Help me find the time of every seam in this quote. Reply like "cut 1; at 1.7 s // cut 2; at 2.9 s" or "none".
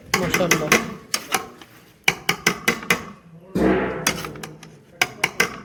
none